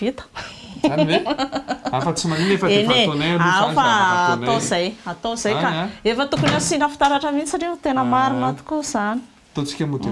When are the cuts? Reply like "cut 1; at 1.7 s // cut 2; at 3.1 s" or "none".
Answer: none